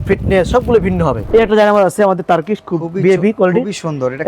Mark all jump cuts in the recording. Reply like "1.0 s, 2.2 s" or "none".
1.2 s